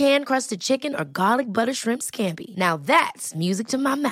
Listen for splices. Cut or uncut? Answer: uncut